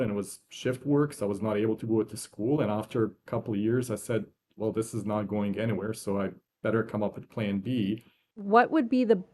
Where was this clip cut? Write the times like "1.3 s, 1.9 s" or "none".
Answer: 8.4 s